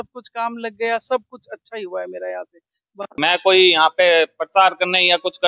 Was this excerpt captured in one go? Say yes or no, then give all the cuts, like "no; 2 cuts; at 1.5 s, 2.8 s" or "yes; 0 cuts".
no; 1 cut; at 3.2 s